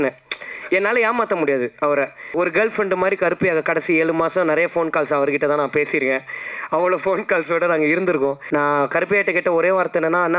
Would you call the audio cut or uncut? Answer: cut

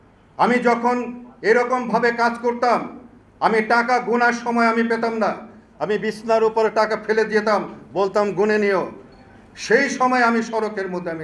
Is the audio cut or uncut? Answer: uncut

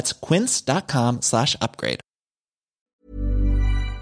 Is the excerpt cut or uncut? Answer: cut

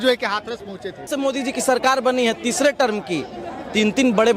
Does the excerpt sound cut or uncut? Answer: cut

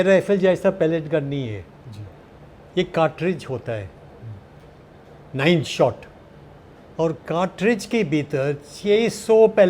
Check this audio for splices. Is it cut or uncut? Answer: uncut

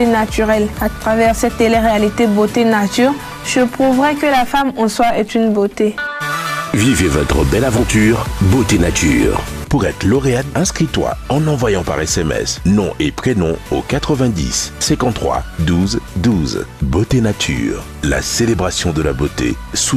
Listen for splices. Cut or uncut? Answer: uncut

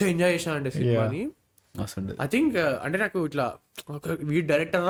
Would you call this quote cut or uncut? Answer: uncut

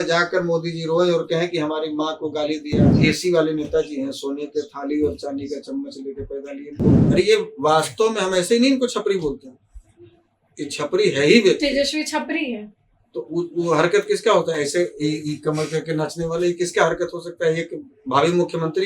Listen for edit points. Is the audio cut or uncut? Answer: cut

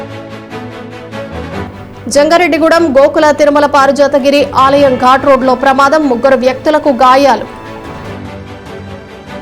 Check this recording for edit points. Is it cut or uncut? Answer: uncut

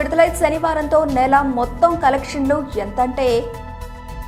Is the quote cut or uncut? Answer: uncut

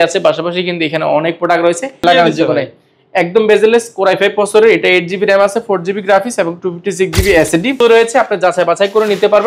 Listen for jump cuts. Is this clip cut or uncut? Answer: cut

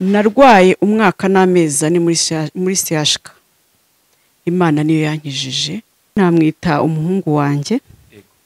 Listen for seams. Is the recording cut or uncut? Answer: cut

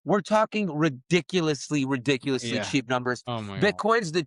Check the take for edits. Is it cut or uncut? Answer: uncut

